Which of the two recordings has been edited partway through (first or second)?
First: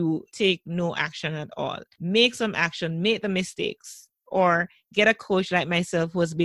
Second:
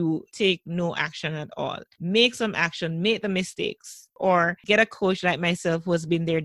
second